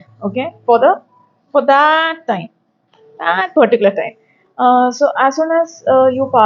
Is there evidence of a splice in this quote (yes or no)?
no